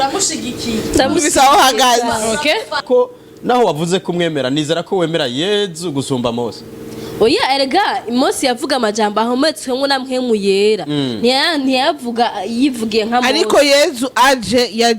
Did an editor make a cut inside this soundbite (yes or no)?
yes